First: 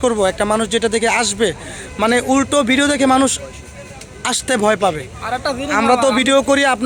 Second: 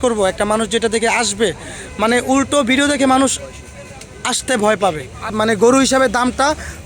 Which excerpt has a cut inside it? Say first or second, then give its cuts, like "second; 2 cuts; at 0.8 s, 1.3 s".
second; 1 cut; at 5.3 s